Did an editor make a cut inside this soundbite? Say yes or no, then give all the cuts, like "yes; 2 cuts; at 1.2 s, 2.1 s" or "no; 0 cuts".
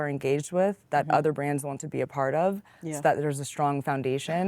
no; 0 cuts